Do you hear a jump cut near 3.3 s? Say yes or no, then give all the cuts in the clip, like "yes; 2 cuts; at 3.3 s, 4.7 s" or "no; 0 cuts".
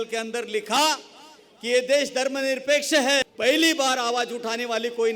yes; 1 cut; at 3.3 s